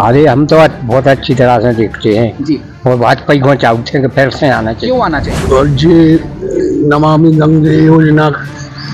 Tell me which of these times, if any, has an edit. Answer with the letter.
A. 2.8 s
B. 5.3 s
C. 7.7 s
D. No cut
B